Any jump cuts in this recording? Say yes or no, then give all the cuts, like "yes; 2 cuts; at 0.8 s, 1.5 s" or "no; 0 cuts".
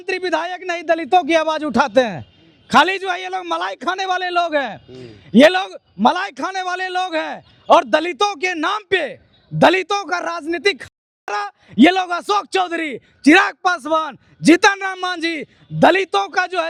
no; 0 cuts